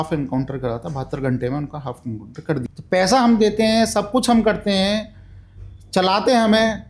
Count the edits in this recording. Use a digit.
1